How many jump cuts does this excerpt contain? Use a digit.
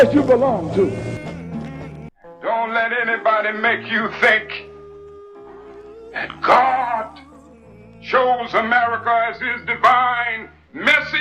1